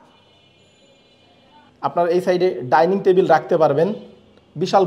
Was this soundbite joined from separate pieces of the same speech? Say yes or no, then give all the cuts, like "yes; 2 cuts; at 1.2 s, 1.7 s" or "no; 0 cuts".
yes; 1 cut; at 1.7 s